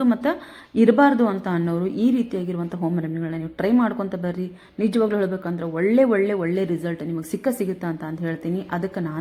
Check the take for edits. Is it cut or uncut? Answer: uncut